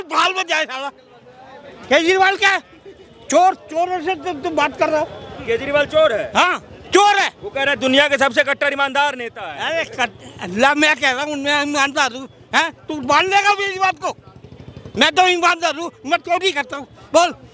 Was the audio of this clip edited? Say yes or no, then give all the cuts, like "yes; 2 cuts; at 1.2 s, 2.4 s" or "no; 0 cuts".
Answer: no; 0 cuts